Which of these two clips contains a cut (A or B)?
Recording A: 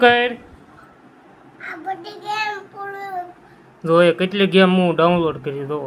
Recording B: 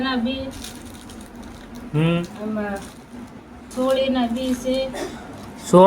B